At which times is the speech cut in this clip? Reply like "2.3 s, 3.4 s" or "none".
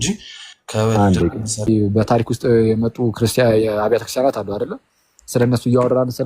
1.7 s